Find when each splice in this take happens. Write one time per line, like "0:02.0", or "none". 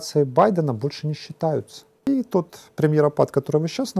0:02.1